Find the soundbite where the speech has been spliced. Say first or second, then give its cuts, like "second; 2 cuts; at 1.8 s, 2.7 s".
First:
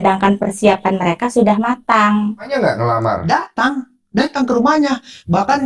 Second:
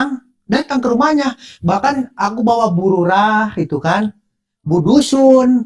first; 1 cut; at 2.5 s